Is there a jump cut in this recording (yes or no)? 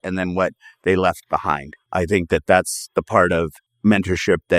yes